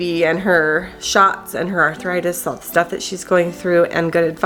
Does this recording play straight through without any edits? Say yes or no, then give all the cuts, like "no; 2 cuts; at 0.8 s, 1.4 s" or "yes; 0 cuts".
yes; 0 cuts